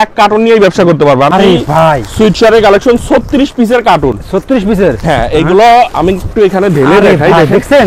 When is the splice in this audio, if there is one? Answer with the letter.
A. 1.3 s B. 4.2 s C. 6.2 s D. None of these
A